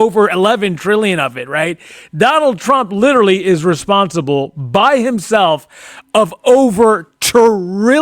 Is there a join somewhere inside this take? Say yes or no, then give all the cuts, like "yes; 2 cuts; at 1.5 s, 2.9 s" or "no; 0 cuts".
no; 0 cuts